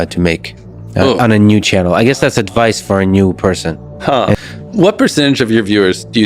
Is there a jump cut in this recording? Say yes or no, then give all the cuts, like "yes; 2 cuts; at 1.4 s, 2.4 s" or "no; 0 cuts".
yes; 1 cut; at 4.3 s